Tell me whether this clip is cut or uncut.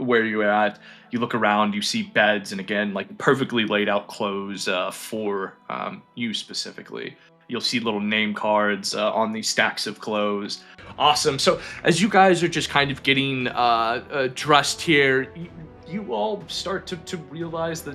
cut